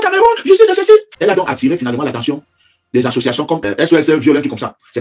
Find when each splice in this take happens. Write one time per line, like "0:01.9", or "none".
0:01.1
0:03.7